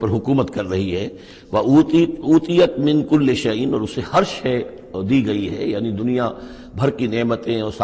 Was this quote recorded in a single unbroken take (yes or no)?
yes